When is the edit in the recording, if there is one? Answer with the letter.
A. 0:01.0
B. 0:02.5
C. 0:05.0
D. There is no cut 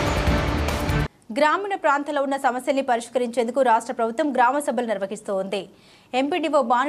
A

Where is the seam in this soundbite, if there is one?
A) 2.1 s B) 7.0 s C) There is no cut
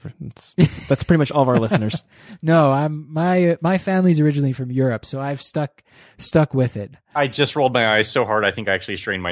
B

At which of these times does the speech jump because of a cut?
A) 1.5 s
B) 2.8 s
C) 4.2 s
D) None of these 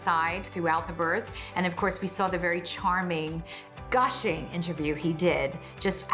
D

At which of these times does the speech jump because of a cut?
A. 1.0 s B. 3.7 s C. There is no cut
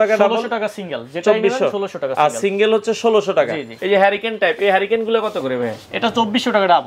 B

